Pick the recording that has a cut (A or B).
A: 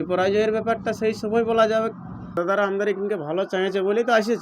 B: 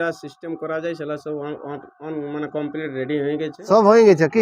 A